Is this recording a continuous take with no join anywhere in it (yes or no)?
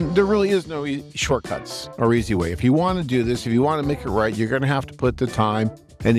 yes